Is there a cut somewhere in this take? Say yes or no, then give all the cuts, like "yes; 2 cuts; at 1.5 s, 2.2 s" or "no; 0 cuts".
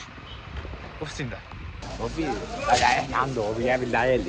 yes; 1 cut; at 1.8 s